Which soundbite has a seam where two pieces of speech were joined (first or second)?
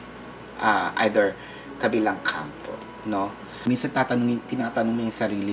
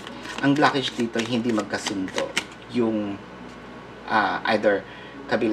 first